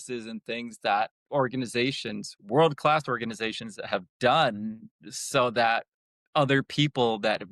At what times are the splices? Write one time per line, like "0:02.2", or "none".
none